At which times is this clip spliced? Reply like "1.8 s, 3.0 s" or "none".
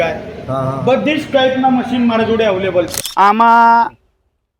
3.0 s